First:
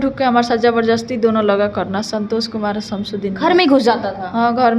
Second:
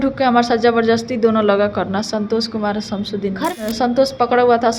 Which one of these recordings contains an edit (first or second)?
second